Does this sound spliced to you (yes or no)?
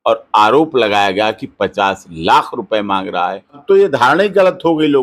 yes